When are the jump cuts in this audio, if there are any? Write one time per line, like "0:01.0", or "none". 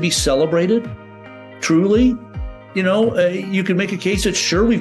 none

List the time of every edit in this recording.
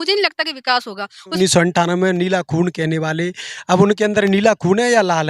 0:01.4

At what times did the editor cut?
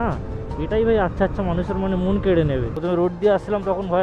0:02.7

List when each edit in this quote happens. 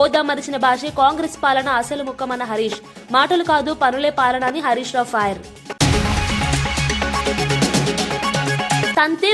0:05.6

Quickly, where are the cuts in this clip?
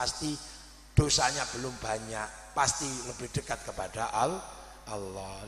0:01.2

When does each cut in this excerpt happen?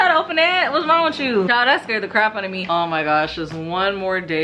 0:02.6

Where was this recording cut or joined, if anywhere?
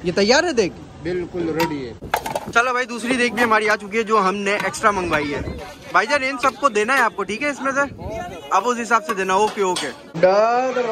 0:02.0
0:10.1

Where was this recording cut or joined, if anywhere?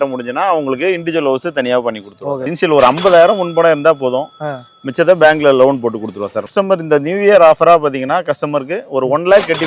0:02.5
0:06.6

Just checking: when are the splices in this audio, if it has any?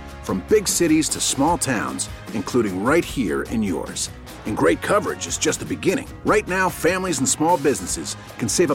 none

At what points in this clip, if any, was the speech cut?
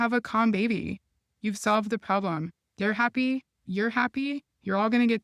none

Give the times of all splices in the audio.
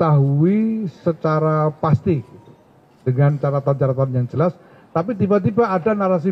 none

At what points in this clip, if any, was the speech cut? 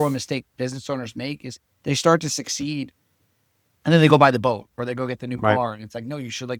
none

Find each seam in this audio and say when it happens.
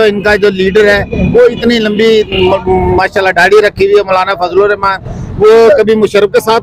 none

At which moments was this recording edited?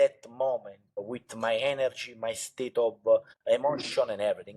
0:01.1
0:03.5

